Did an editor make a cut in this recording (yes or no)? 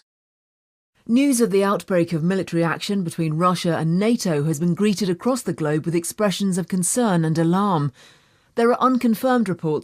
yes